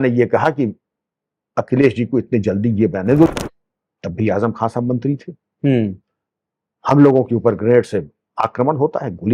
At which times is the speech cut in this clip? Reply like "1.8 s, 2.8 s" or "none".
3.3 s